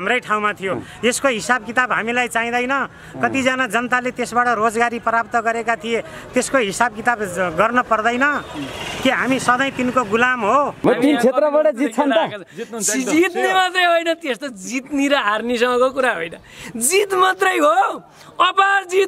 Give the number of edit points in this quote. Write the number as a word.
one